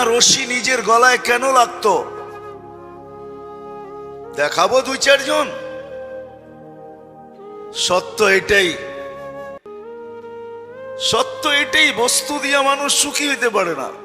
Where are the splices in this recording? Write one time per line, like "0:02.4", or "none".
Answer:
0:08.8
0:10.4